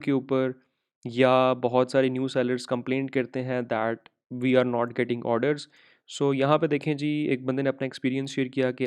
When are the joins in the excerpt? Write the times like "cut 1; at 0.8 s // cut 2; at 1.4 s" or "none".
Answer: cut 1; at 6.0 s